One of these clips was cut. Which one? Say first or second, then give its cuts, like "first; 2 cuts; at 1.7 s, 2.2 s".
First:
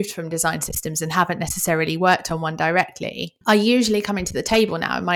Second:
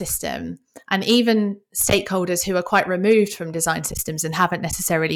first; 1 cut; at 3.3 s